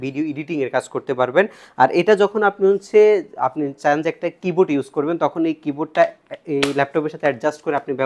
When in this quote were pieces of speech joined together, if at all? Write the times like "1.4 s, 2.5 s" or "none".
none